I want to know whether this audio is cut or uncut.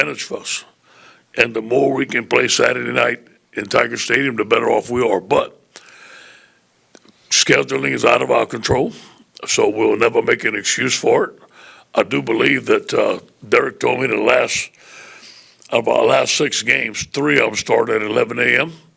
uncut